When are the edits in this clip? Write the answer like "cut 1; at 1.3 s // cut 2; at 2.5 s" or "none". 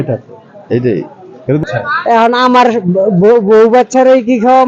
cut 1; at 1.6 s